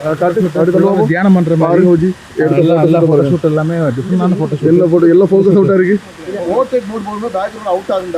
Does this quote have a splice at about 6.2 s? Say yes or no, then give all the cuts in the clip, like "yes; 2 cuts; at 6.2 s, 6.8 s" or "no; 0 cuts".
yes; 1 cut; at 6.2 s